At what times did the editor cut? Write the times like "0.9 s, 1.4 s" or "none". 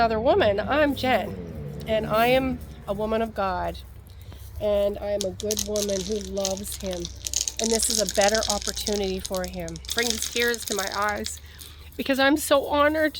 9.8 s